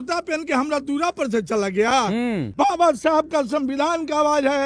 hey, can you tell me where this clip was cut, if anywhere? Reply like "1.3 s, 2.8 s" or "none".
2.5 s